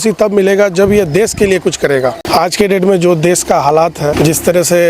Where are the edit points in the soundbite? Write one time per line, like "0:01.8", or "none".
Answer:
0:02.2
0:04.1